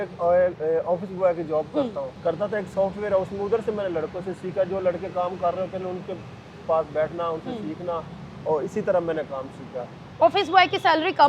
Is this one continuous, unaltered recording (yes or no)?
no